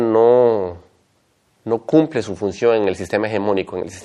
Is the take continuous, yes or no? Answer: yes